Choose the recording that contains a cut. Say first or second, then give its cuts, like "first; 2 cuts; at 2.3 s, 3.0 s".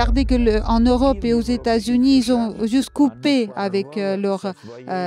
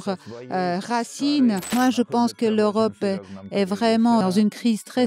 second; 2 cuts; at 1.6 s, 4.2 s